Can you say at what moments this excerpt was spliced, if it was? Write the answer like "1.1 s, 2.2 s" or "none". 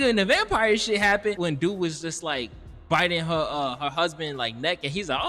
1.4 s

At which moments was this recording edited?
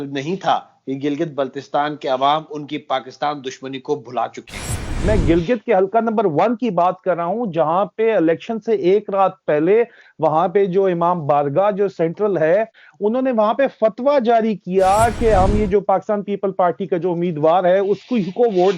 4.9 s, 12.8 s

